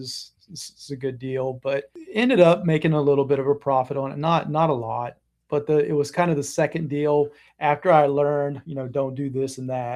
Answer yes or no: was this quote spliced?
yes